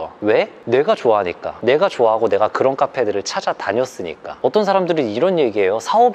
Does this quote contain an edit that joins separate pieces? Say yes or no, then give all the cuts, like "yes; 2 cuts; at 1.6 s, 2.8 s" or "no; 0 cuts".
yes; 1 cut; at 4.2 s